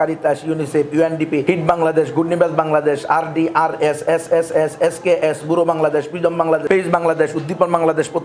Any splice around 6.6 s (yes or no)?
yes